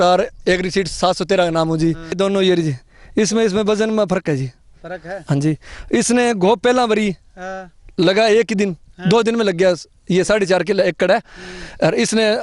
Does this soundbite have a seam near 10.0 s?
no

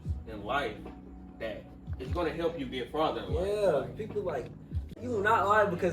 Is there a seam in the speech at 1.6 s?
no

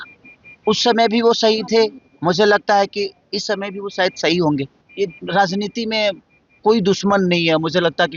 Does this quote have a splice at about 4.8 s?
yes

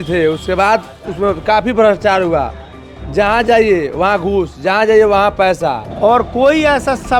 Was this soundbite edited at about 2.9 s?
no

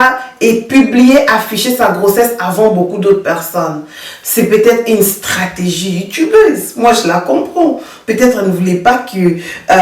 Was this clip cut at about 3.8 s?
no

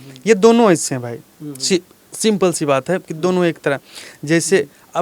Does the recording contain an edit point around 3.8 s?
no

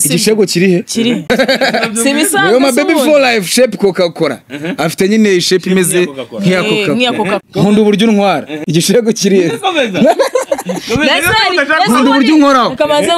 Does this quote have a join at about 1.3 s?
yes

